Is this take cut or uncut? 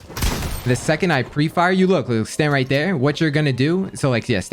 uncut